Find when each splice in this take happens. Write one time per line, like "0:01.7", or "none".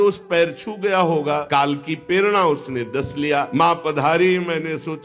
0:01.4
0:03.5

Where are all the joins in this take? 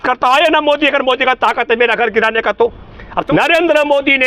0:03.2

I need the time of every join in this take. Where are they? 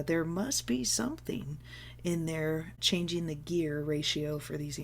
0:02.8

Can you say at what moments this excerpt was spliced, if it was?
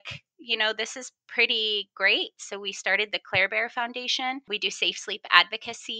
0:04.5

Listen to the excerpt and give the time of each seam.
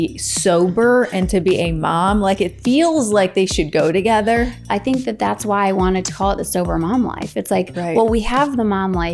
0:04.6

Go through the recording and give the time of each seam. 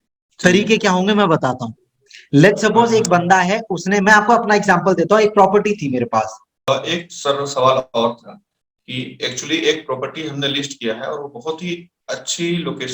0:06.7

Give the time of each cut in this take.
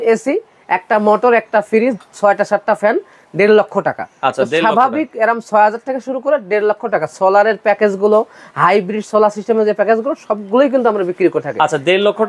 none

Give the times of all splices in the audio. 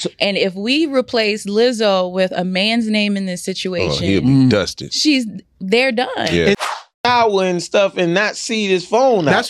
0:06.6

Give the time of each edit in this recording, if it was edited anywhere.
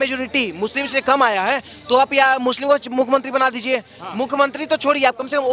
none

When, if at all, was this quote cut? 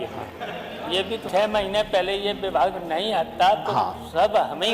0:01.2

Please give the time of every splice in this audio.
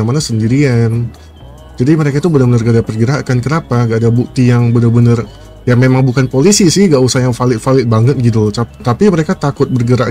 none

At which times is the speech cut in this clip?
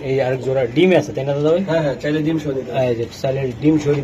none

